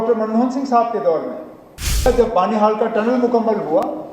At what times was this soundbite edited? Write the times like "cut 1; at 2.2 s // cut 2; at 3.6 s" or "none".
cut 1; at 2.1 s